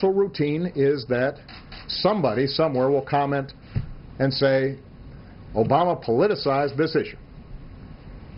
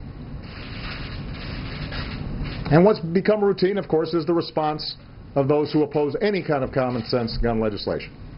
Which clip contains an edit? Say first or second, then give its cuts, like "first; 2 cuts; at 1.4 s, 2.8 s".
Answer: second; 1 cut; at 7.0 s